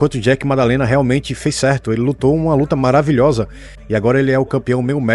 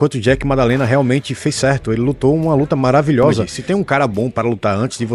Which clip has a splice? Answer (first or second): second